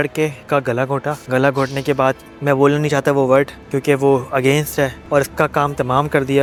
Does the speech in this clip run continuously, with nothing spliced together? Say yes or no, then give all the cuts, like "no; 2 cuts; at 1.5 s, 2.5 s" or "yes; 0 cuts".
yes; 0 cuts